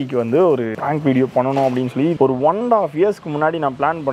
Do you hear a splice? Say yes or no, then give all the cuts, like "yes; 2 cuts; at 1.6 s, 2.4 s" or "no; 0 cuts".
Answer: yes; 1 cut; at 2.1 s